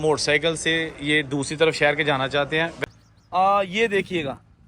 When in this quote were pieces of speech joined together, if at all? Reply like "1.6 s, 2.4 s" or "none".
2.7 s